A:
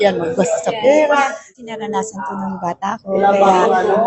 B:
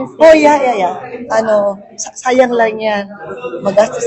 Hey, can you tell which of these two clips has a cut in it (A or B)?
A